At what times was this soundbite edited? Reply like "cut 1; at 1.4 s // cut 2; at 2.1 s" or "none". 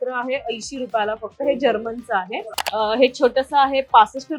cut 1; at 2.4 s